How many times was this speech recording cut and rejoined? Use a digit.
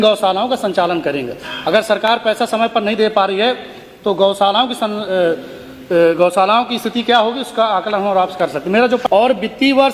1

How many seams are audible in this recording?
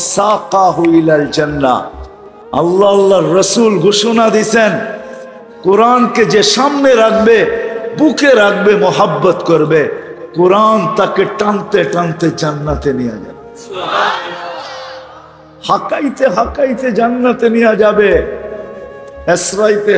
0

